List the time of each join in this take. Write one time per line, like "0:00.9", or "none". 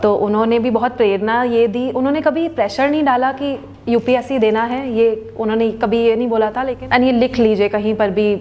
0:06.7